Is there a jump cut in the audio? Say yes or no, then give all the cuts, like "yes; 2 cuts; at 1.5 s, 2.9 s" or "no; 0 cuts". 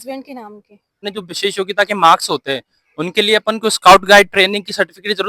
yes; 1 cut; at 0.9 s